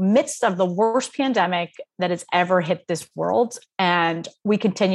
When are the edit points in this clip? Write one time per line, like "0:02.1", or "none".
none